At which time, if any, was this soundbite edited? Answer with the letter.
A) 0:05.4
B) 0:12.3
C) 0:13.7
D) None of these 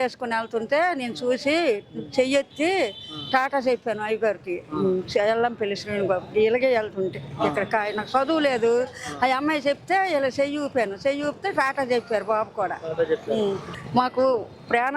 C